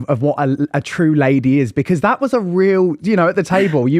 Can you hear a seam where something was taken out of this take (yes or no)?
no